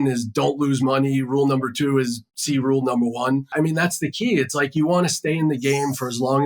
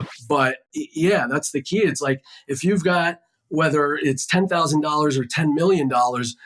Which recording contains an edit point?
first; 1 cut; at 3.5 s

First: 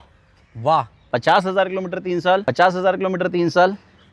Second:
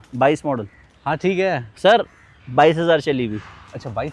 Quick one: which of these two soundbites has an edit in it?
first; 2 cuts; at 1.0 s, 2.5 s

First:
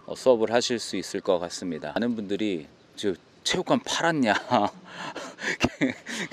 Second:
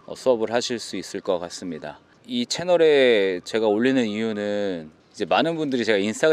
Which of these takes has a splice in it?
first; 1 cut; at 2.0 s

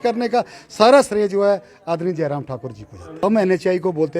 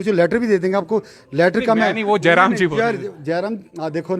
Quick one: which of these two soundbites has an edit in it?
first; 1 cut; at 3.2 s

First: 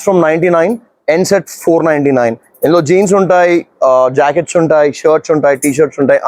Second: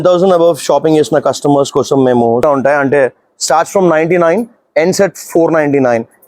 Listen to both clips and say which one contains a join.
second; 1 cut; at 2.4 s

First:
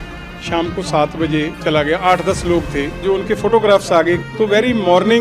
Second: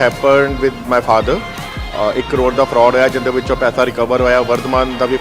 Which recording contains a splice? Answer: first; 3 cuts; at 1.5 s, 3.0 s, 4.2 s

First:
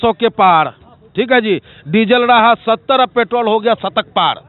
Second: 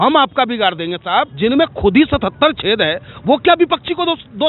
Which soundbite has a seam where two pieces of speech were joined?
second; 1 cut; at 1.3 s

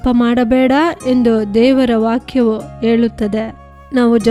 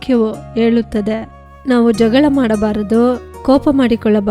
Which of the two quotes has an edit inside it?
second; 1 cut; at 3.3 s

